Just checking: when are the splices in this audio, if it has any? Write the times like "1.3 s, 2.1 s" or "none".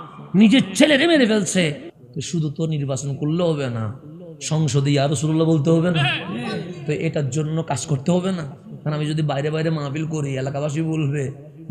1.9 s